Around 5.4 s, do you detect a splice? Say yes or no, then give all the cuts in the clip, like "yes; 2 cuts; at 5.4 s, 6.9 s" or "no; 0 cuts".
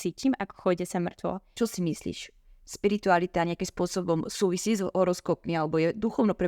no; 1 cut; at 1.5 s